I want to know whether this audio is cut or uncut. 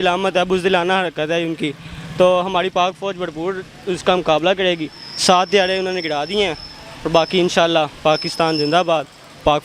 uncut